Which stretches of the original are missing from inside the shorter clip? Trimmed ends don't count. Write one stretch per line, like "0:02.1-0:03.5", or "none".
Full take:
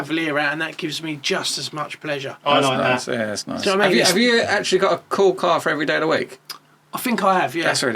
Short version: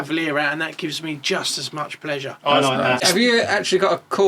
0:03.0-0:04.0